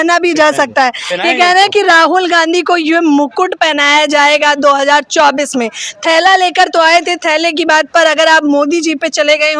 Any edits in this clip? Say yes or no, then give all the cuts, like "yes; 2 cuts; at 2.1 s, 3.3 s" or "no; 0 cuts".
no; 0 cuts